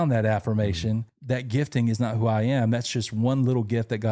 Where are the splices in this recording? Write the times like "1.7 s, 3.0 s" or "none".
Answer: 1.1 s